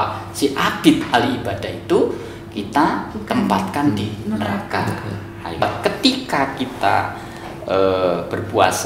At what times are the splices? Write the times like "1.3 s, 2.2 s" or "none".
5.6 s